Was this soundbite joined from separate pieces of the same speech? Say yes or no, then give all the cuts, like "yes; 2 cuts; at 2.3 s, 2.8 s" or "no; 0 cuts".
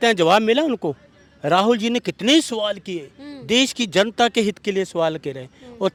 no; 0 cuts